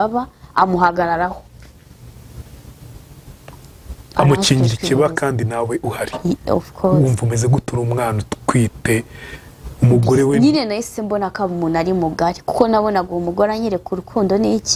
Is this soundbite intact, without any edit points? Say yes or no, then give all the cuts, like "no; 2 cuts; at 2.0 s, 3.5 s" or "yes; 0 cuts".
yes; 0 cuts